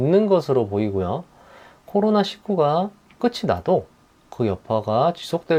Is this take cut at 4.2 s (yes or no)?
no